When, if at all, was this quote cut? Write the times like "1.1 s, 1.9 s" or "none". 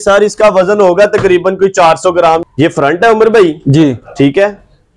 2.4 s